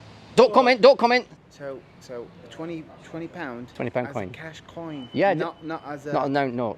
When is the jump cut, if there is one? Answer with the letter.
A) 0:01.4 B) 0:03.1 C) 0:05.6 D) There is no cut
A